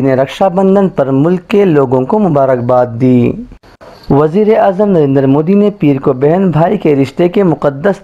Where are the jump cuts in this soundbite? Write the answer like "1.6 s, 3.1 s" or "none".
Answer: none